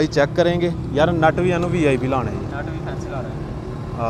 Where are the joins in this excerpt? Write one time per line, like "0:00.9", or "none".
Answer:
none